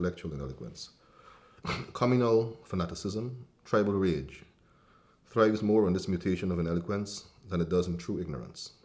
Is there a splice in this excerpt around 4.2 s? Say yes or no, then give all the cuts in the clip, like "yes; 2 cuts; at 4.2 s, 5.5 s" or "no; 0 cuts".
no; 1 cut; at 2.2 s